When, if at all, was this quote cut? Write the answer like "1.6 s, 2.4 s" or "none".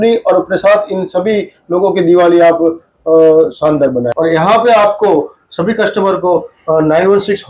4.1 s